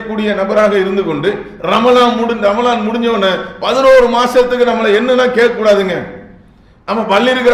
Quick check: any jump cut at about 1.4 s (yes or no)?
no